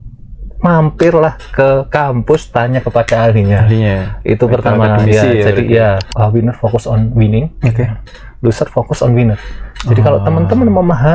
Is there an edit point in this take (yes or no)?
yes